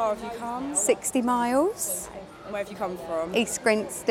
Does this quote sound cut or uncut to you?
uncut